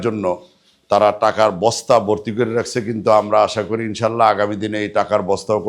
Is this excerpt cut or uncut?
uncut